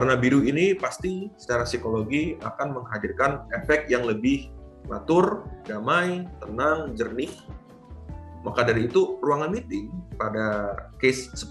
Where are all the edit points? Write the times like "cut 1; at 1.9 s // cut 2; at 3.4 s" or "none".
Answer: none